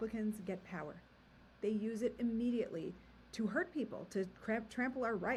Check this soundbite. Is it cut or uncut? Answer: uncut